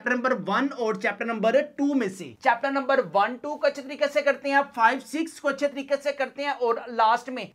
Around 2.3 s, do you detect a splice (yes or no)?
yes